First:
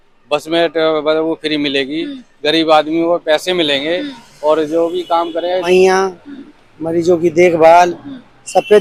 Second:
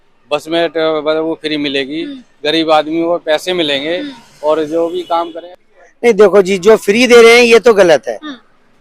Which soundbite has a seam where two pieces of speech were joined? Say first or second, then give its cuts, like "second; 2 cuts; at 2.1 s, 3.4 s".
second; 1 cut; at 5.4 s